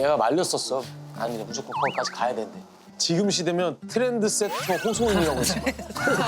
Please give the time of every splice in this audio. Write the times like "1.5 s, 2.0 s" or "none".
0.9 s